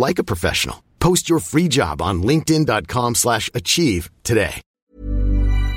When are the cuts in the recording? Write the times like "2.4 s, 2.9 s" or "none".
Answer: 4.7 s